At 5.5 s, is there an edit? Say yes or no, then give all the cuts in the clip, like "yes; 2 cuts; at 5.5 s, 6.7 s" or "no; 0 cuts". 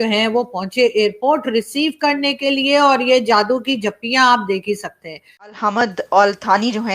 yes; 1 cut; at 5.5 s